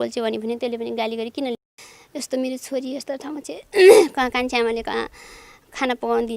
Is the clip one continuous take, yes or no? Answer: no